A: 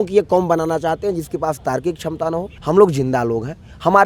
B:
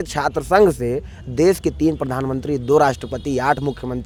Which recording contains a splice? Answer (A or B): A